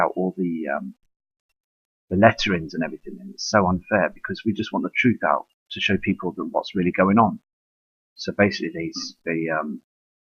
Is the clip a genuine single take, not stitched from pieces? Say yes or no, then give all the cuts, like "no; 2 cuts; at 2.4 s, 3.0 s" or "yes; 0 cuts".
yes; 0 cuts